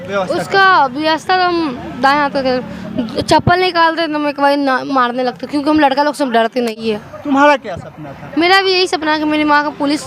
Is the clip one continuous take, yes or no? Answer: no